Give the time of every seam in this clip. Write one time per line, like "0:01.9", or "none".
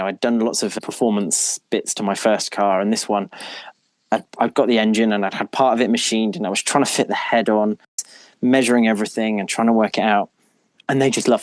0:08.1

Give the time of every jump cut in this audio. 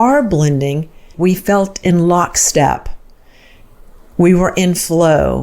0:01.1

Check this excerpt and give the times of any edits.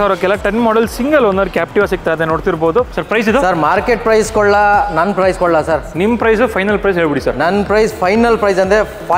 0:03.0

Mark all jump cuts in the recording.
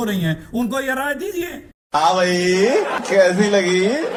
none

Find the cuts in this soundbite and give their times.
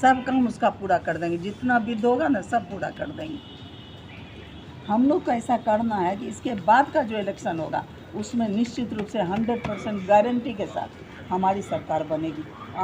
0:04.6

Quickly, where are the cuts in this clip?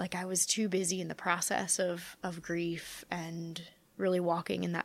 none

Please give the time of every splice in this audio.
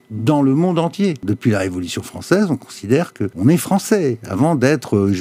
0:01.2
0:03.2

